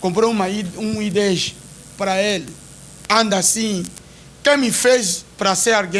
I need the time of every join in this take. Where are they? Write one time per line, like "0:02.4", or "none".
none